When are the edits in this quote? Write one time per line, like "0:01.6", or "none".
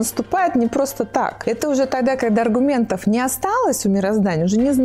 0:01.4